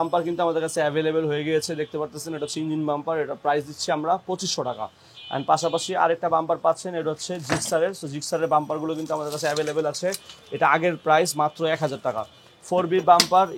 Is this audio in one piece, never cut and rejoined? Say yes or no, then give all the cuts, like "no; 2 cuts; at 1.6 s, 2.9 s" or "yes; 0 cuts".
yes; 0 cuts